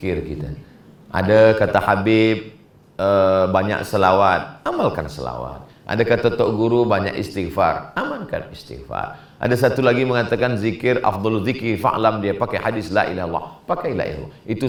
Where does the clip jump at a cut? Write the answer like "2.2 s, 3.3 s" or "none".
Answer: none